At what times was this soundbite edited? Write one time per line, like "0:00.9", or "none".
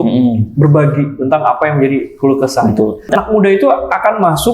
0:03.2